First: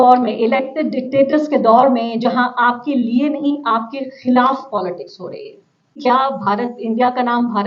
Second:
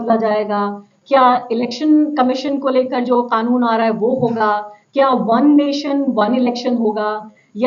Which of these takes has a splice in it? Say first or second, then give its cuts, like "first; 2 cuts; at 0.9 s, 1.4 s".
first; 1 cut; at 6.0 s